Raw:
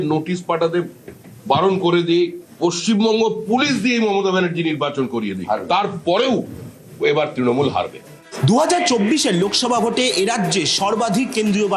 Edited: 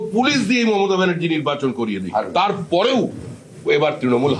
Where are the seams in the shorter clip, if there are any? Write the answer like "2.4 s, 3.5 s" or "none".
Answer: none